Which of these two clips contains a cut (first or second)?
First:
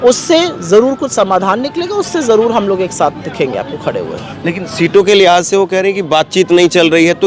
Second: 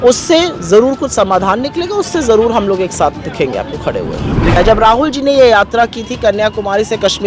second